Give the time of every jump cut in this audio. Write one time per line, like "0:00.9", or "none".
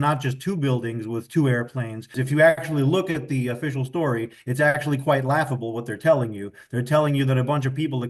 0:02.1